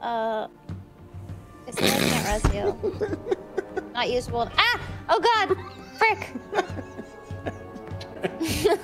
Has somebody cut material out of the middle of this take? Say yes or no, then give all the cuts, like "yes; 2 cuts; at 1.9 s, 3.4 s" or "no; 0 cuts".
no; 0 cuts